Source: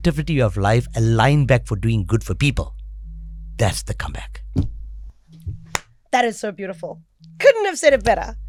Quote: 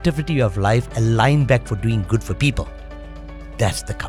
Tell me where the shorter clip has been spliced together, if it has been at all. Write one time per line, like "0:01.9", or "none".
none